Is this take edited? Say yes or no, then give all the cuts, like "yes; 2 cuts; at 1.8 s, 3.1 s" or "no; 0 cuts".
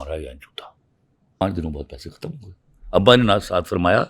yes; 1 cut; at 1.4 s